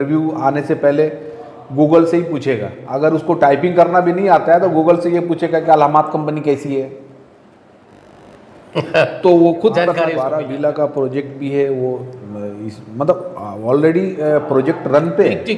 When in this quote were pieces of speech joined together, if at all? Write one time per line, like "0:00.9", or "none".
0:10.2

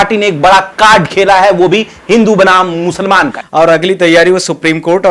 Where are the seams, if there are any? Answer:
0:03.4

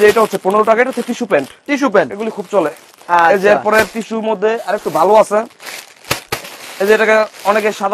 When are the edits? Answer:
none

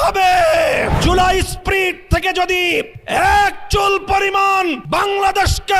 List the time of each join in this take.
0:01.0
0:03.0
0:04.8

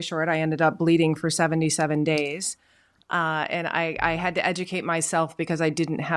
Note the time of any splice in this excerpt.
none

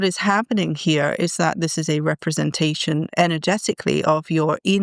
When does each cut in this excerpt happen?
none

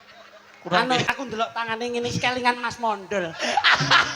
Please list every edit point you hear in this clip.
0:01.1

